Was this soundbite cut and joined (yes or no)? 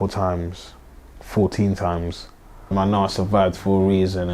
yes